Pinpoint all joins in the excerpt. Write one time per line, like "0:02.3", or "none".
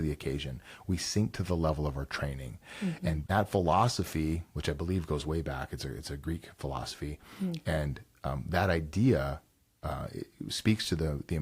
0:03.3